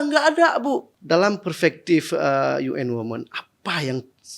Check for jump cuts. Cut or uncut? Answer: cut